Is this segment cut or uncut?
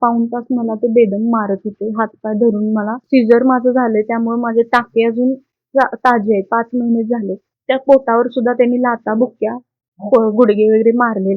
cut